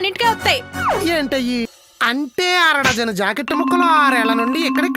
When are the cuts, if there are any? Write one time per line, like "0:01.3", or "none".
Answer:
0:01.8